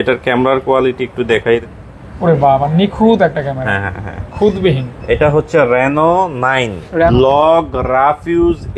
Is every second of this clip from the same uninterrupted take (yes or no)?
no